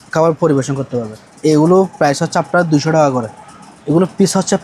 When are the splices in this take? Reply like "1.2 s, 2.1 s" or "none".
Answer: 1.3 s, 3.4 s

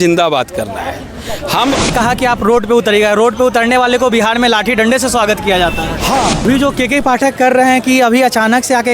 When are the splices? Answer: 1.9 s, 6.4 s

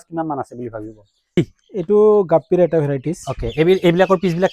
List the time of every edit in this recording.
1.4 s

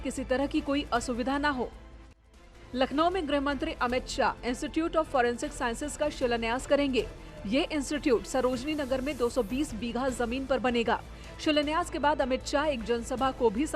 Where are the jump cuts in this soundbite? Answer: 2.1 s

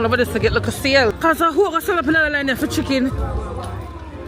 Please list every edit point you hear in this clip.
1.1 s

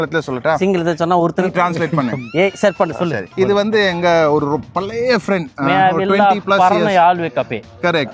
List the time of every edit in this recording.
3.3 s

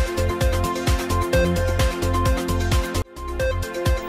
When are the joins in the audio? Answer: 3.0 s

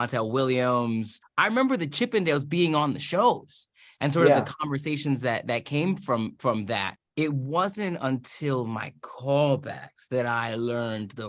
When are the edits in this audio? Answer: 1.2 s, 7.0 s

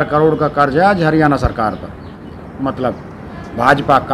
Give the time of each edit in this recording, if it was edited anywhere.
2.4 s

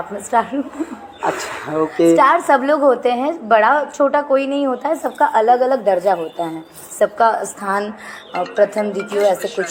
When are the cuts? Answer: none

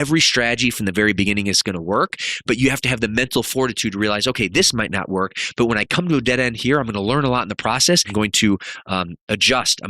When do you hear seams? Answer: 8.1 s

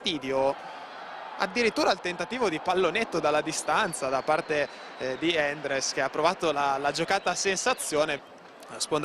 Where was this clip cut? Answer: 1.3 s

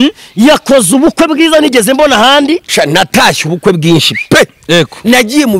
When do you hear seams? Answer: 2.7 s

